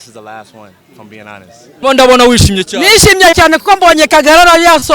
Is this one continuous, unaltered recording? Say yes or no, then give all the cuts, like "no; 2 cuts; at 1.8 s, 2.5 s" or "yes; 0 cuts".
no; 1 cut; at 1.7 s